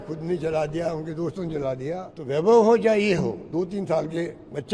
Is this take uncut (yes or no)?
no